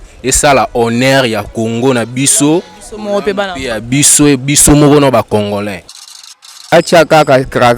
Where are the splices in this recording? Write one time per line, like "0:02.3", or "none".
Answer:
0:06.2